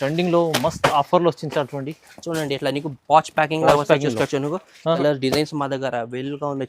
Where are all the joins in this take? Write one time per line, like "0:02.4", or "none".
0:05.0